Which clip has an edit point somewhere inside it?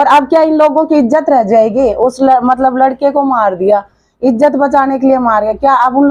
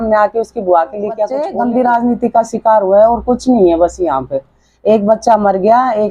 second; 1 cut; at 1.4 s

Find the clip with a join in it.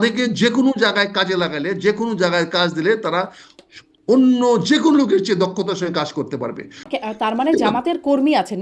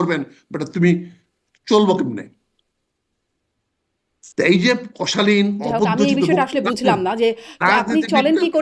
first; 1 cut; at 6.9 s

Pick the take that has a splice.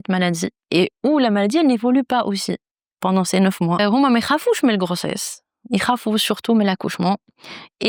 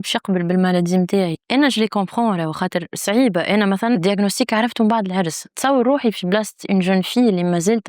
second; 1 cut; at 5.6 s

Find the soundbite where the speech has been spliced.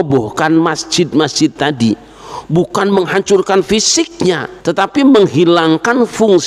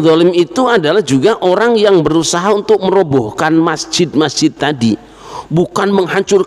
first; 1 cut; at 4.5 s

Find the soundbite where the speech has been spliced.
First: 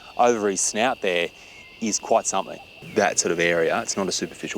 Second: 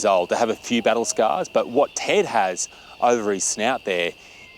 first; 1 cut; at 2.8 s

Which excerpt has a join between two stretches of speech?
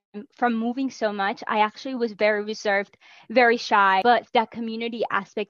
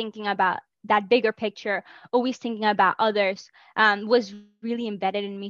first; 1 cut; at 4.0 s

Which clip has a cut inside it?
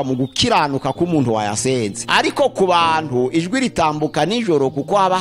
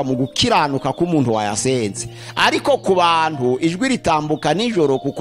first; 1 cut; at 2.0 s

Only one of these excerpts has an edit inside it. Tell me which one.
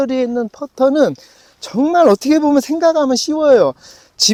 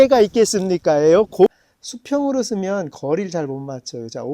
second; 1 cut; at 1.5 s

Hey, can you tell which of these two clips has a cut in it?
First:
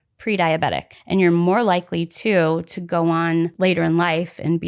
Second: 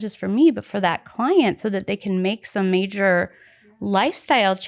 first; 2 cuts; at 0.9 s, 3.5 s

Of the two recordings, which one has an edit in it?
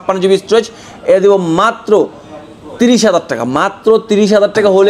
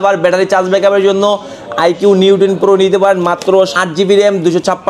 second; 1 cut; at 3.7 s

